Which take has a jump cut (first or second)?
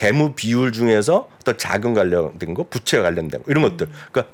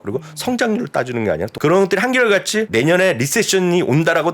second